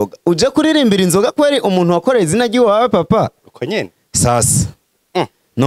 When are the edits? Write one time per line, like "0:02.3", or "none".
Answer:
none